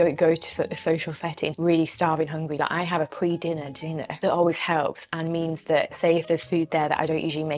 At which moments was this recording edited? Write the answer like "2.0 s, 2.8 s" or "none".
none